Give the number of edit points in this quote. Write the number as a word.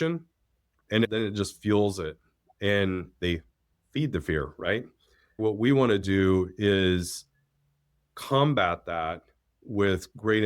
two